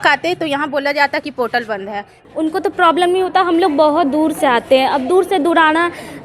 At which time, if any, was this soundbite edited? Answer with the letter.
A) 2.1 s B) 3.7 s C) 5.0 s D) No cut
A